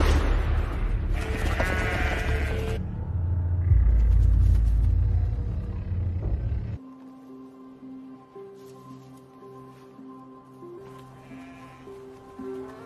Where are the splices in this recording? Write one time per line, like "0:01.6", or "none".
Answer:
none